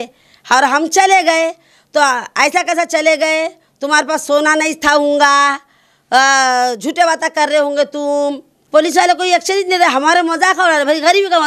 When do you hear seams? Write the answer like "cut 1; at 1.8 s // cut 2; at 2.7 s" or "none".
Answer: cut 1; at 8.5 s